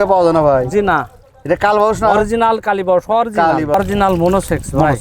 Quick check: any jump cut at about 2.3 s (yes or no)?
no